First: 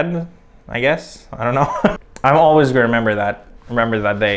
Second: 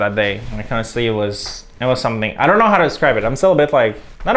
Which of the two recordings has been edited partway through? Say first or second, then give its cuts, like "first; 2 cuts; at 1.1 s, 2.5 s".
first; 1 cut; at 1.9 s